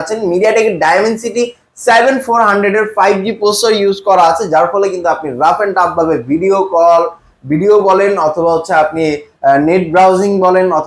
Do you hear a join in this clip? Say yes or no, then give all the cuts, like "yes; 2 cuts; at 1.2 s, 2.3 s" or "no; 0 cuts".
no; 0 cuts